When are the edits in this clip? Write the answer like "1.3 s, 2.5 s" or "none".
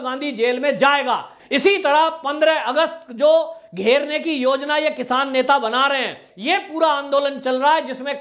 1.3 s, 6.3 s

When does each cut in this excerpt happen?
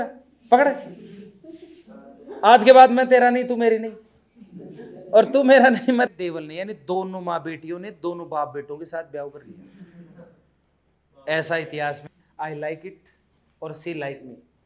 6.1 s, 12.1 s

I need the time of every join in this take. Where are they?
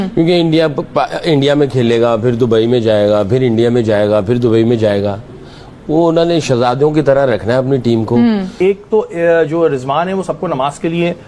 8.6 s

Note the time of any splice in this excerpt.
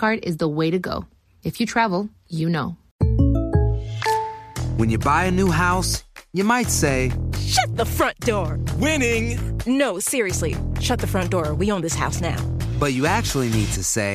2.8 s

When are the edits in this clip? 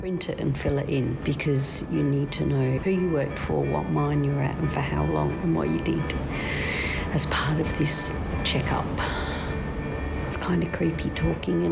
1.2 s, 2.8 s, 9.5 s

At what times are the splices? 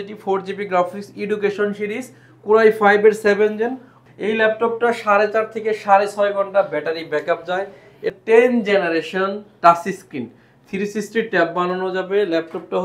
3.9 s, 8.1 s

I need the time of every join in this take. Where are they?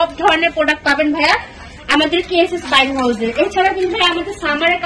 none

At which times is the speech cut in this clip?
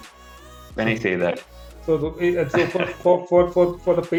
none

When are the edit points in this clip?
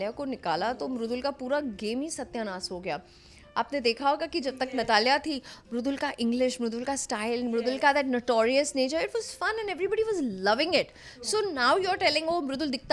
none

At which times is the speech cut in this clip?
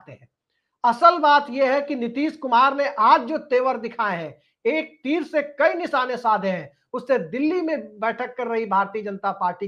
none

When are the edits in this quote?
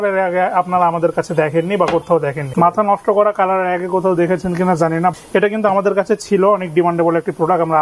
2.4 s, 5.2 s

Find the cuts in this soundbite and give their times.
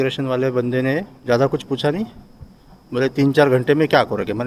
none

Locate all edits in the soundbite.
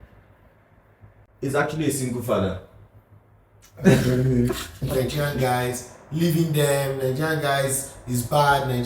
4.9 s

